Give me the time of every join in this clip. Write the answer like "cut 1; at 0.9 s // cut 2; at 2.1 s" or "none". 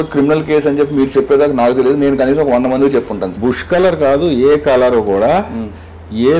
cut 1; at 3.3 s

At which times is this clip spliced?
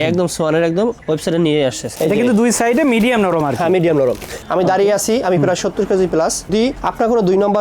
cut 1; at 1.9 s // cut 2; at 4.4 s // cut 3; at 6.5 s

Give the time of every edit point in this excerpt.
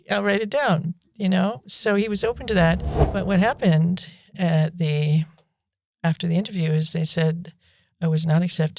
cut 1; at 3.0 s

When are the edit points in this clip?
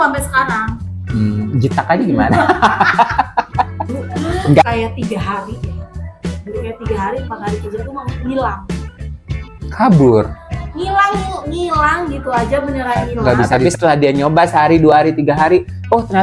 cut 1; at 4.6 s // cut 2; at 13.6 s

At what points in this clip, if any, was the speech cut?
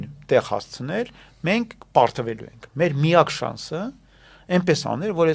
none

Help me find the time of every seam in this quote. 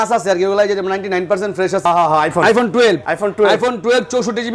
cut 1; at 1.9 s // cut 2; at 3.1 s

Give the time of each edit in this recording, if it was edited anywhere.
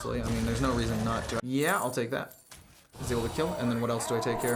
cut 1; at 1.4 s

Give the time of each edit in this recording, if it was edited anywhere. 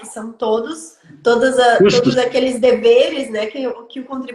none

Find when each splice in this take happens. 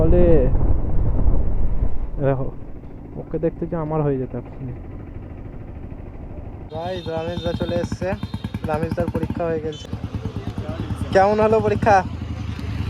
cut 1; at 6.7 s // cut 2; at 9.8 s

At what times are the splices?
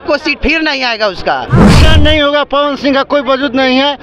cut 1; at 1.7 s

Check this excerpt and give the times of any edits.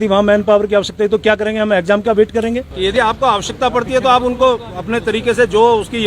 cut 1; at 2.8 s

